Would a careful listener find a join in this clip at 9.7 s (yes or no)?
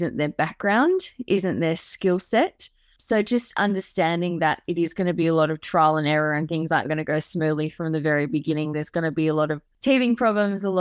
yes